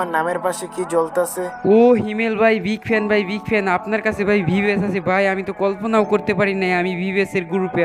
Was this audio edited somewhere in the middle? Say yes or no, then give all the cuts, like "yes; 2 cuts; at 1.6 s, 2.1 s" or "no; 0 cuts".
no; 0 cuts